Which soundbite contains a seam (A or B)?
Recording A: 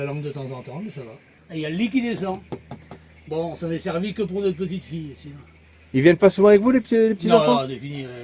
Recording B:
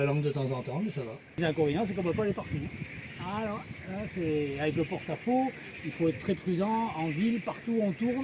B